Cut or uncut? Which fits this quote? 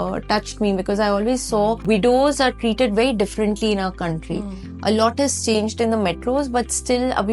cut